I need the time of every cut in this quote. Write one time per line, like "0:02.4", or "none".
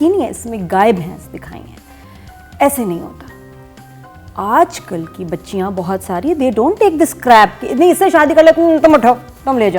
none